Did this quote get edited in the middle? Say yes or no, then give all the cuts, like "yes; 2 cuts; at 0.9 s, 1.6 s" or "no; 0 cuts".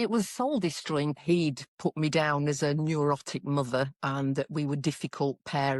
yes; 1 cut; at 1.1 s